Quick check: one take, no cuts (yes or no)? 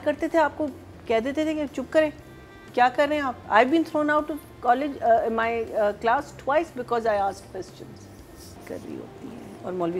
no